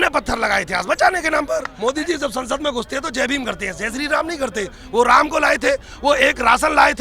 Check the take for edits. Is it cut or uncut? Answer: cut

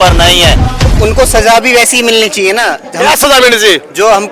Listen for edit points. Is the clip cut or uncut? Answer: cut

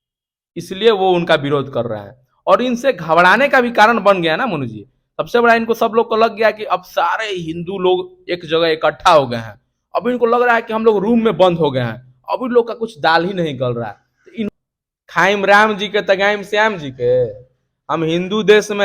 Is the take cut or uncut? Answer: cut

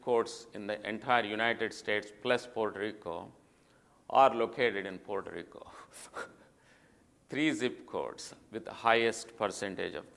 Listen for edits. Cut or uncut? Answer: uncut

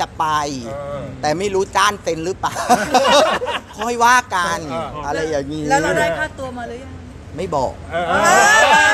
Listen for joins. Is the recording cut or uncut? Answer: uncut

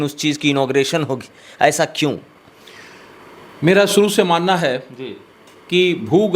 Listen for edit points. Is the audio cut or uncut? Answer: uncut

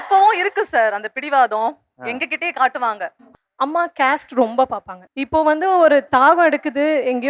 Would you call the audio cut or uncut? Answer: cut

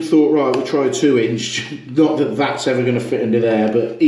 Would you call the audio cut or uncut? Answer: uncut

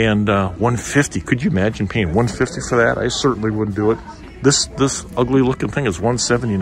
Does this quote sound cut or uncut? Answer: uncut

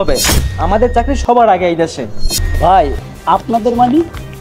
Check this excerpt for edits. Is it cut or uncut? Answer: cut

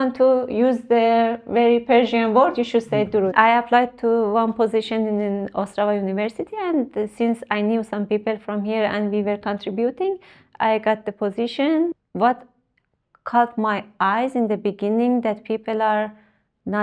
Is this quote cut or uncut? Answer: cut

